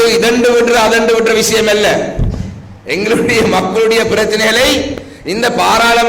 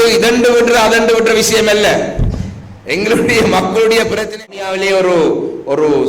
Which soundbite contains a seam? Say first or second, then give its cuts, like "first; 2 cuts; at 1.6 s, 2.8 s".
second; 1 cut; at 4.5 s